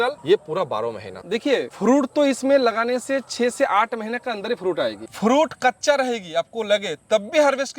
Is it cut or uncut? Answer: cut